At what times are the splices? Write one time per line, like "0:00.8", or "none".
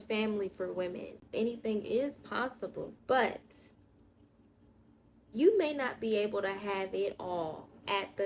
0:01.3
0:02.9